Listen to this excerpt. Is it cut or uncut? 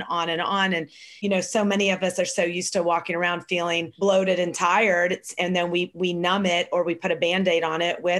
cut